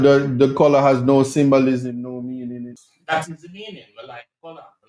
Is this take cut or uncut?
cut